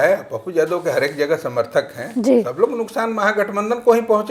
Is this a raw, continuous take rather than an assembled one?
yes; 0 cuts

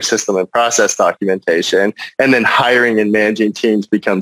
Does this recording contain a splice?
no; 0 cuts

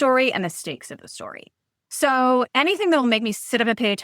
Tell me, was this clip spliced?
yes; 1 cut; at 2.5 s

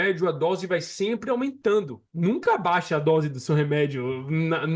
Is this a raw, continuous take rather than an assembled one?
yes; 0 cuts

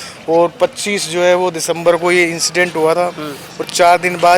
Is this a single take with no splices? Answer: yes; 0 cuts

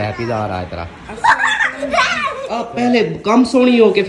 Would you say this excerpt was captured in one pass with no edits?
no; 1 cut; at 2.6 s

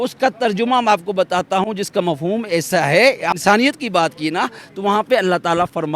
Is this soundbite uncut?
no; 1 cut; at 3.4 s

